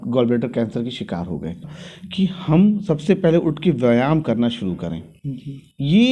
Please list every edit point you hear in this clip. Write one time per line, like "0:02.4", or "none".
0:01.7